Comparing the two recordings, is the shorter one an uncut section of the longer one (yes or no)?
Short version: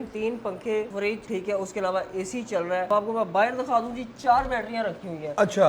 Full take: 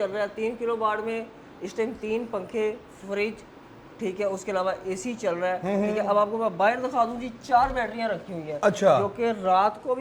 no